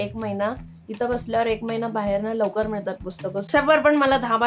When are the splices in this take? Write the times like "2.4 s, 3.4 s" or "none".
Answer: 3.5 s